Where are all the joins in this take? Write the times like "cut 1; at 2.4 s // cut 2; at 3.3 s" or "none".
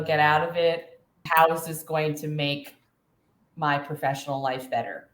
cut 1; at 1.2 s